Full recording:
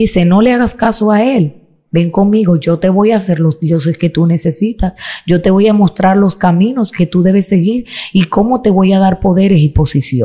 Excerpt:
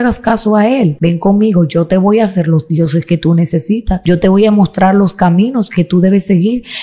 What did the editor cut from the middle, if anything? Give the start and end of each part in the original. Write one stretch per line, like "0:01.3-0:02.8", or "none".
0:01.5-0:01.9
0:04.9-0:05.2